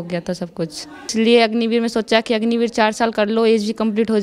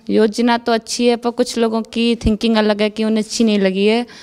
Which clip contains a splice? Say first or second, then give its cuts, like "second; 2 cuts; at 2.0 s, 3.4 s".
first; 1 cut; at 1.1 s